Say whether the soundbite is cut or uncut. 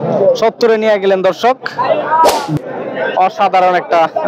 cut